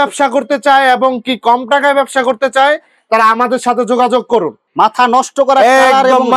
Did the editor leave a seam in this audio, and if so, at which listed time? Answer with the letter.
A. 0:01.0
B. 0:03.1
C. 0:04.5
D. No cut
C